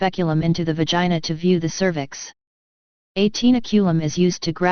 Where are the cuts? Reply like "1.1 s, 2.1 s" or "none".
1.3 s